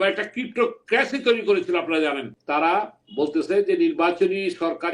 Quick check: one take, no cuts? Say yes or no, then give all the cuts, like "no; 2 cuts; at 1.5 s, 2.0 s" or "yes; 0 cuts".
no; 1 cut; at 2.3 s